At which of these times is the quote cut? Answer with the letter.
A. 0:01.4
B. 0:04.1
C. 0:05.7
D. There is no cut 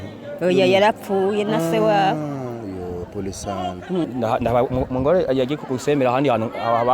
B